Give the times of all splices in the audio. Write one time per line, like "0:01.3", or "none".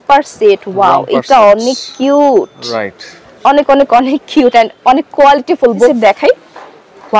0:05.9